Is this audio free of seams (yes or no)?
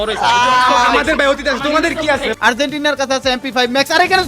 no